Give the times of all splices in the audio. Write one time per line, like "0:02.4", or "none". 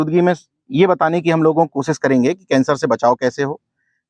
none